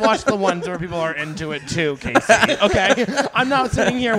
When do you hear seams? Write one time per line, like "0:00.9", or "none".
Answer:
none